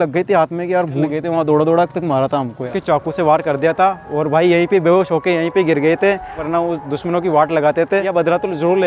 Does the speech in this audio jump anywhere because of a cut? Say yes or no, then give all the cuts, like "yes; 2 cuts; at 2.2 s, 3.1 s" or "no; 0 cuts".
yes; 4 cuts; at 1.0 s, 2.7 s, 6.4 s, 8.1 s